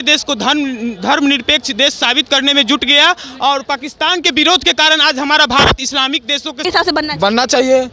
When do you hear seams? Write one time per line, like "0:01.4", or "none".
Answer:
0:06.6

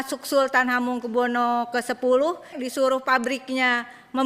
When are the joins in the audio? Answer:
0:02.5

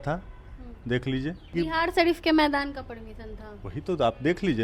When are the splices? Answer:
0:01.5

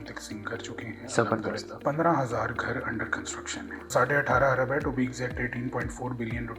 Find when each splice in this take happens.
0:01.7
0:03.9

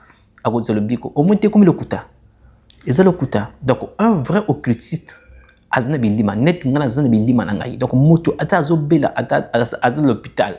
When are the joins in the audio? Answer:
none

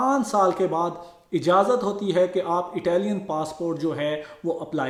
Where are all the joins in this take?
none

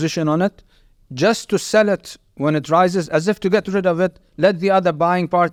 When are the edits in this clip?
none

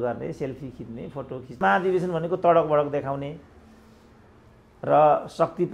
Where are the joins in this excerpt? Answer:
0:01.6

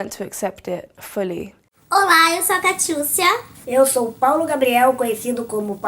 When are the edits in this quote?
0:01.8

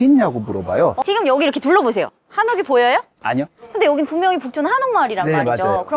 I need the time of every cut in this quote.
0:01.0
0:03.6

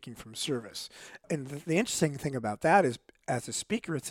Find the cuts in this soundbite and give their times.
0:01.3

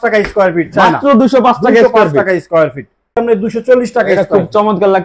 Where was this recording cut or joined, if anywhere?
0:03.2

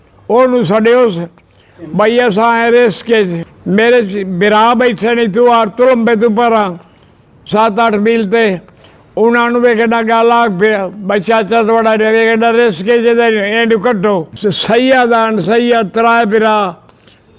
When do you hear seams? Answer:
0:14.3

